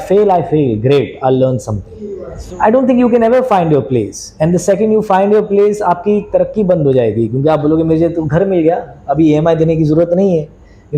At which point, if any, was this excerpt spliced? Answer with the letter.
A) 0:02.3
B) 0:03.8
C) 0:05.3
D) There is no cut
A